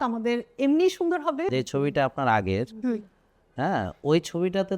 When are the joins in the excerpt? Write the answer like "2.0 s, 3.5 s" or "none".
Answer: 1.5 s

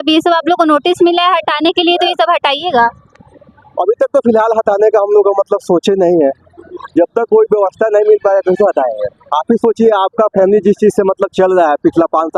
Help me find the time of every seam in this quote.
none

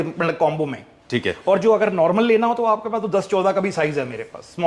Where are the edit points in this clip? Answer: none

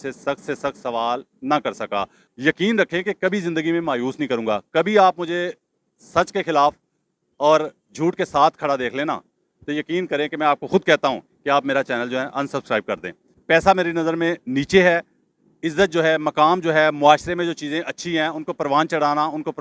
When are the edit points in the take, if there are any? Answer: 2.2 s, 13.3 s

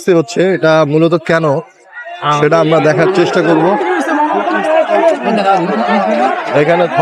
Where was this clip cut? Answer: none

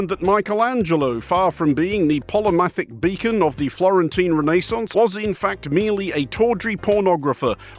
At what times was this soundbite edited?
4.9 s

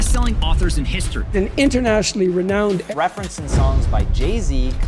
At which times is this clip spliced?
2.9 s

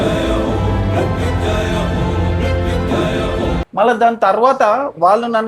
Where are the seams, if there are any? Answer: 3.6 s

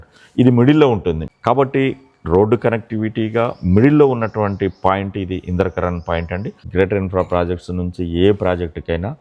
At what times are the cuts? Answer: 1.2 s, 6.6 s

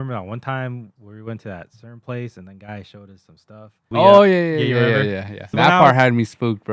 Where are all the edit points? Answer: 3.9 s, 5.5 s

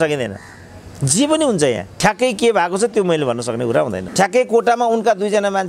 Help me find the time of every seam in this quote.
1.9 s, 4.0 s

